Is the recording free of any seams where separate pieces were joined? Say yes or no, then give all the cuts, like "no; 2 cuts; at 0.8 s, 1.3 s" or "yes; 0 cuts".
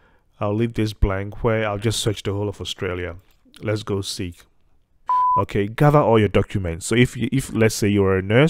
no; 1 cut; at 5.0 s